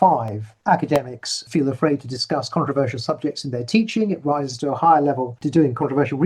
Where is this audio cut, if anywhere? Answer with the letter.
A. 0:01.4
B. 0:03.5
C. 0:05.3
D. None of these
C